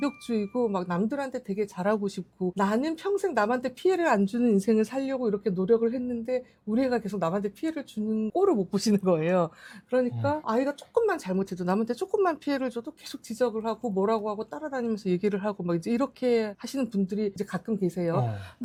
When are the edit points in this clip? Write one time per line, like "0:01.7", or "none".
none